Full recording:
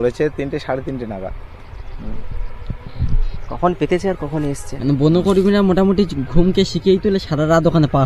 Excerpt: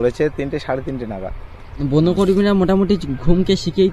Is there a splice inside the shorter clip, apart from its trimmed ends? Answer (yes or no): yes